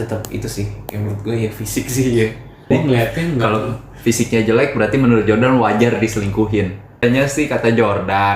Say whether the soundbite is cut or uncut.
cut